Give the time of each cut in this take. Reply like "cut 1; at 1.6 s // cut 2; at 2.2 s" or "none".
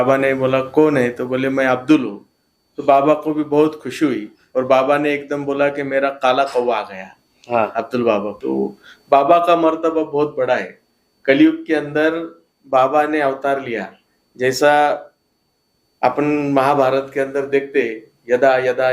cut 1; at 8.4 s